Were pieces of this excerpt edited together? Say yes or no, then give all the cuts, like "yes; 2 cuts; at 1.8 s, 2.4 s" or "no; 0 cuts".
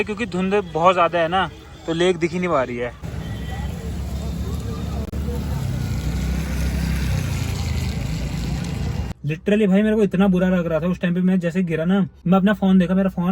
yes; 2 cuts; at 9.1 s, 12.1 s